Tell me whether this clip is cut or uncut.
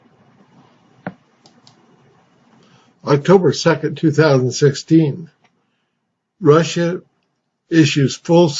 uncut